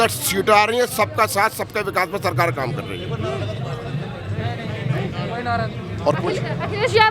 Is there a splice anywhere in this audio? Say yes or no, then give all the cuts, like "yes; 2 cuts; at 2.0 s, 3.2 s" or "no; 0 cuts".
no; 0 cuts